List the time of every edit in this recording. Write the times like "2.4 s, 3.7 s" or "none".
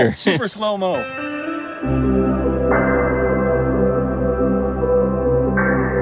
1.1 s